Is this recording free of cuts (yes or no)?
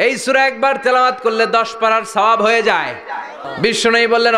no